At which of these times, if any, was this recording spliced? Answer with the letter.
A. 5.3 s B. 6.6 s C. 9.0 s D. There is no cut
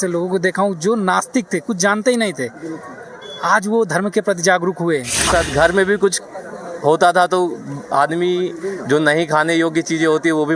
A